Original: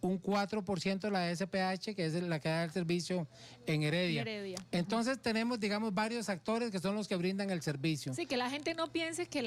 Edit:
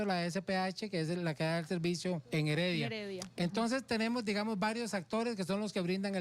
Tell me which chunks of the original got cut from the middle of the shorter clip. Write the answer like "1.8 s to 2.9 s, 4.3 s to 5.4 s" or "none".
3.3 s to 3.6 s

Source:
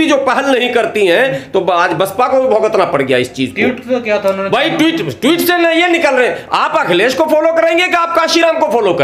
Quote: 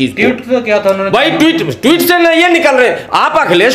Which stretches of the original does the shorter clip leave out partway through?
none

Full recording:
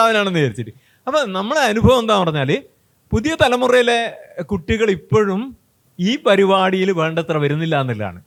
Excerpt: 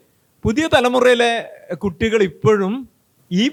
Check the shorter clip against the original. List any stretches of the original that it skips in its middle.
none

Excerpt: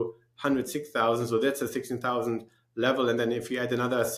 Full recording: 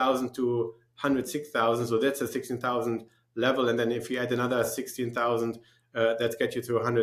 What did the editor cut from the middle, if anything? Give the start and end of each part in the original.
none

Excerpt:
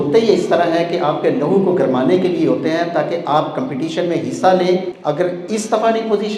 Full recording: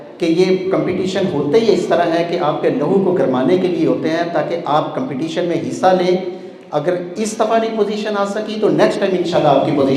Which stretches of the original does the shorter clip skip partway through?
6.3 s to 6.6 s

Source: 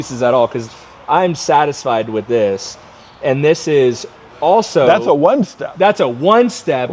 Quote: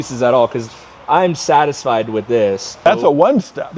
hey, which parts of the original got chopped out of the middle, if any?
2.9 s to 4.9 s

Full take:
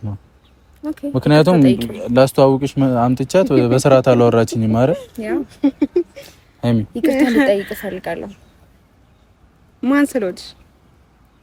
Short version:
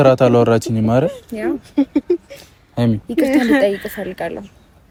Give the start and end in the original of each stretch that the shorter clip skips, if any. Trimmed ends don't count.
none

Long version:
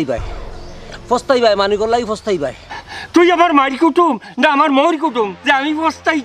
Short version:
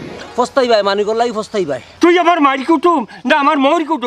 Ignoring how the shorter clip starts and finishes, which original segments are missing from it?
2.6 s to 3.0 s

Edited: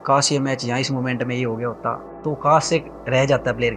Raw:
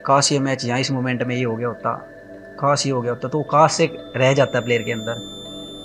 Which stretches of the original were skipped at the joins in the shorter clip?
2.2 s to 3.2 s

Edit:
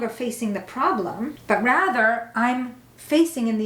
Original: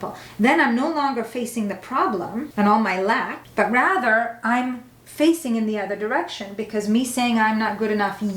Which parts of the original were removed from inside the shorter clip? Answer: 2.5 s to 3.4 s

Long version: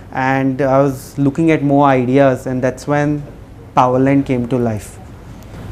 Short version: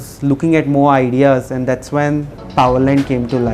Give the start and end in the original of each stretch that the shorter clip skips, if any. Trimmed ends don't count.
3.3 s to 3.6 s

